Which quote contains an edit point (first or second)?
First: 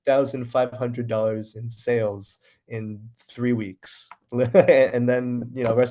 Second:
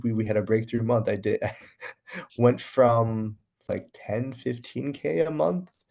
second